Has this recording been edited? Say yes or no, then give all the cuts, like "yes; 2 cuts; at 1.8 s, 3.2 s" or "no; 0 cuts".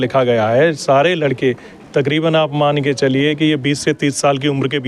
no; 0 cuts